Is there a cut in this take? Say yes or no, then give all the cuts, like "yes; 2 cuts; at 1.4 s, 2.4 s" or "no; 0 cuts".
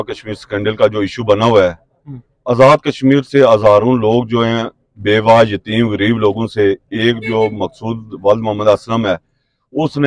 no; 0 cuts